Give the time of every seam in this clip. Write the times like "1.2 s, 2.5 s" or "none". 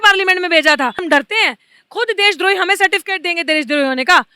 1.0 s